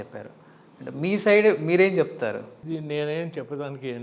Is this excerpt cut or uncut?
cut